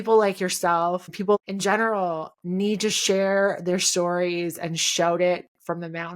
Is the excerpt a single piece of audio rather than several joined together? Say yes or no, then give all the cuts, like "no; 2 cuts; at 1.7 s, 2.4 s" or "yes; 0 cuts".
no; 1 cut; at 1.3 s